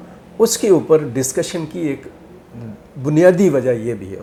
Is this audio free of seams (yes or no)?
yes